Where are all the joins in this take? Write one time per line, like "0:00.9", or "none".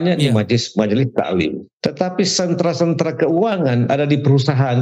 0:01.7